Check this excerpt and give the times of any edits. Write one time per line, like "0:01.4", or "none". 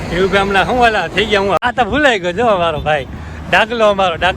0:01.6